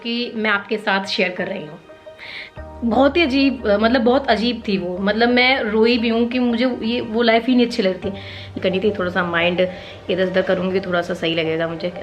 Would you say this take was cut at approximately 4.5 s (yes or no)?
no